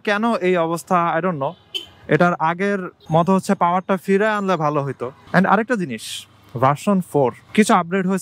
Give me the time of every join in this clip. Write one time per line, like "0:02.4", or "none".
none

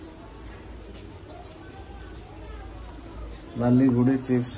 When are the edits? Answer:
none

